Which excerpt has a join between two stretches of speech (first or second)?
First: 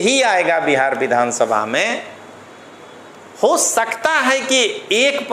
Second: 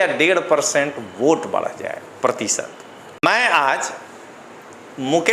second